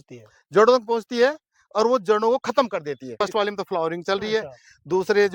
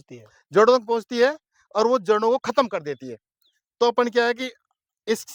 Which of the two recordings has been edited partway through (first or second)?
first